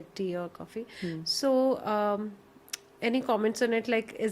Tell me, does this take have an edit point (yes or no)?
no